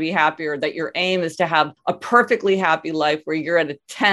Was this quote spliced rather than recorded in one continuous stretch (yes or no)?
yes